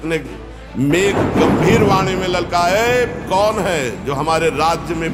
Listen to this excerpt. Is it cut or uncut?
uncut